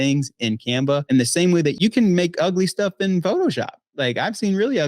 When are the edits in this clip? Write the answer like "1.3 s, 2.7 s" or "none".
1.0 s